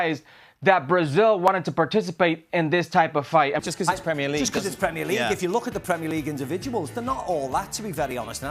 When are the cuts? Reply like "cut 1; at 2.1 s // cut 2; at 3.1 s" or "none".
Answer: cut 1; at 3.6 s